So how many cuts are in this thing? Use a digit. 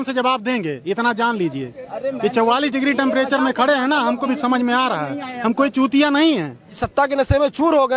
1